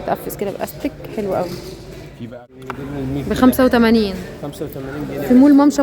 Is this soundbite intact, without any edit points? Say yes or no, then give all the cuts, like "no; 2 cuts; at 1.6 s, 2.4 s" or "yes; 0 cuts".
no; 1 cut; at 2.3 s